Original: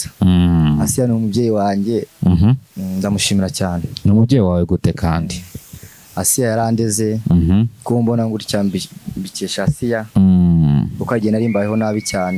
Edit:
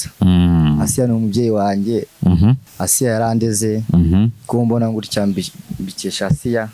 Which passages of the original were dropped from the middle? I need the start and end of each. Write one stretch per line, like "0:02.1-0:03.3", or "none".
0:02.7-0:06.0